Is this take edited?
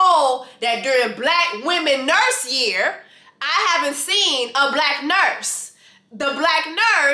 no; 0 cuts

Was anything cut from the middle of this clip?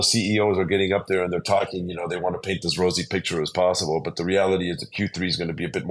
no; 0 cuts

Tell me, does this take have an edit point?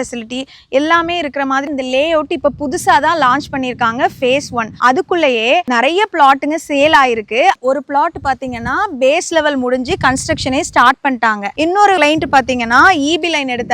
yes; 2 cuts; at 1.7 s, 7.6 s

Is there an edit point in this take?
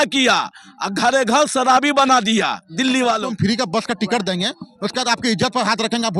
yes; 1 cut; at 3.3 s

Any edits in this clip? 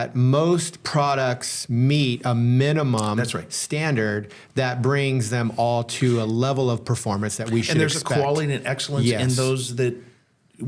no; 0 cuts

